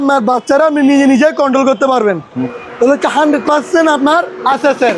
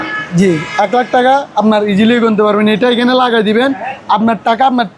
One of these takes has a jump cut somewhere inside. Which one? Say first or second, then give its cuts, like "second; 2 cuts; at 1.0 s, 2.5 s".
first; 1 cut; at 2.5 s